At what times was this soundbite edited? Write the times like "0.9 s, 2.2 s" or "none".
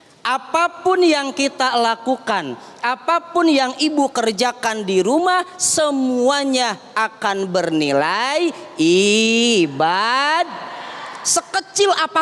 none

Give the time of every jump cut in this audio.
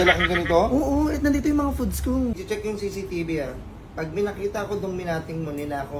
2.4 s

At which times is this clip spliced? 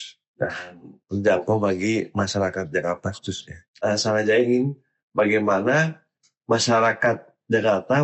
3.7 s

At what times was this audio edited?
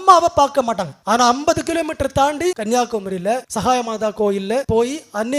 0.9 s, 2.6 s, 3.5 s, 4.6 s

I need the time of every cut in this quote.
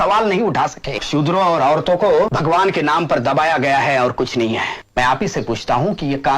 1.0 s, 2.3 s, 4.8 s

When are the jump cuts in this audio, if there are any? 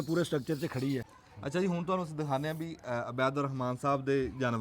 1.1 s

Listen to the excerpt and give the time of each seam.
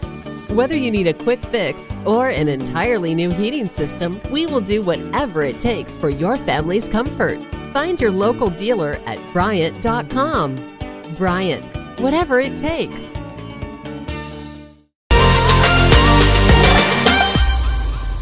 14.9 s

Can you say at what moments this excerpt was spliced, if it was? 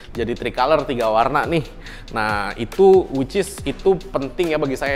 none

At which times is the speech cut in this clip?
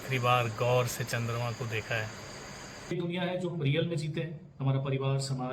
2.9 s

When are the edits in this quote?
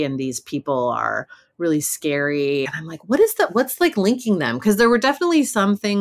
2.8 s

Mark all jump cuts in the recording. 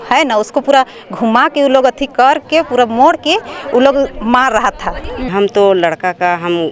5.3 s

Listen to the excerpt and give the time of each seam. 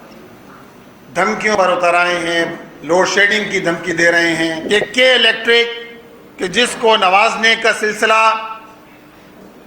4.6 s

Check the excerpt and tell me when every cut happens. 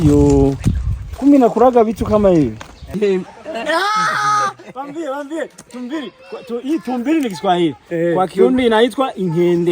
2.9 s

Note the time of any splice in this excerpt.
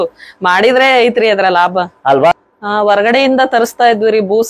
2.2 s

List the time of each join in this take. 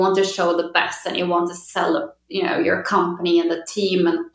none

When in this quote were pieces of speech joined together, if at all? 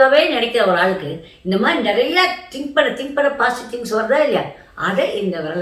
none

